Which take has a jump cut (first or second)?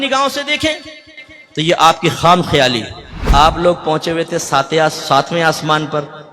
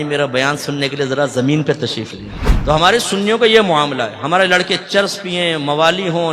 first